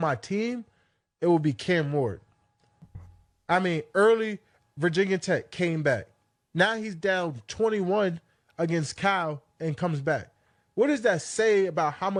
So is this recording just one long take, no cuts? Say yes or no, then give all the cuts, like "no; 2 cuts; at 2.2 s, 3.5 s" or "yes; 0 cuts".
yes; 0 cuts